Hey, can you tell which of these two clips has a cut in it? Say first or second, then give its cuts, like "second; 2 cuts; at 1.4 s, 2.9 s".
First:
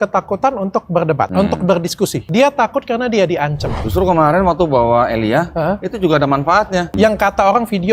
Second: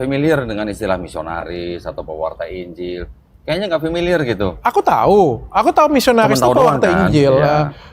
first; 4 cuts; at 1.3 s, 2.2 s, 3.7 s, 6.9 s